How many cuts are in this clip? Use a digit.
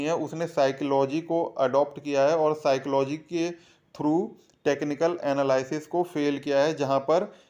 0